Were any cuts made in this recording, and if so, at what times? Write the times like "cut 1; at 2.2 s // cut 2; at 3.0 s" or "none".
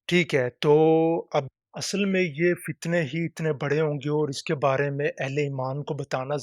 cut 1; at 1.5 s